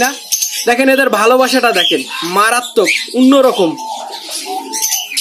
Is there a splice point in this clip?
no; 0 cuts

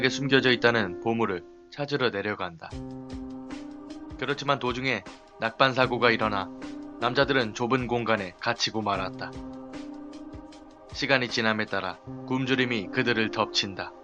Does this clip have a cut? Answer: yes; 1 cut; at 12.6 s

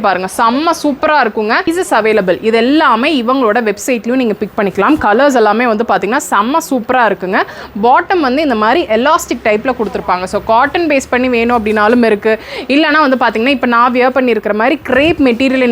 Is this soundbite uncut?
no; 1 cut; at 1.7 s

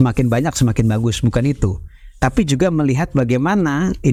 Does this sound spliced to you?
no; 0 cuts

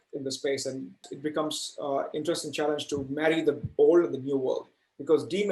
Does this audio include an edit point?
yes; 1 cut; at 1.1 s

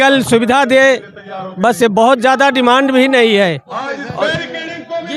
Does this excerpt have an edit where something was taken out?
no; 0 cuts

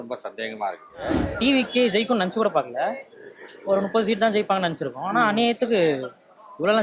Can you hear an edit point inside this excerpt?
yes; 1 cut; at 1.2 s

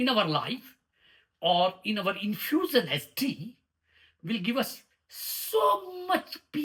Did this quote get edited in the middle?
no; 0 cuts

